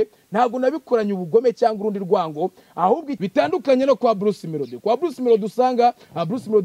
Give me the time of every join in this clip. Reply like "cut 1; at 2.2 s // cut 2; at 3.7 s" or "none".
cut 1; at 3.1 s